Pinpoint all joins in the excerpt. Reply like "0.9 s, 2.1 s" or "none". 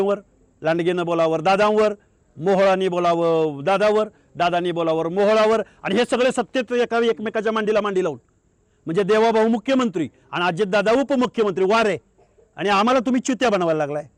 none